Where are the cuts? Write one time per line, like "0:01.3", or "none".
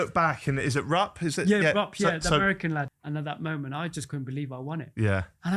0:02.9